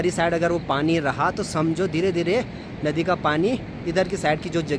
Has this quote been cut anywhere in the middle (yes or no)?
no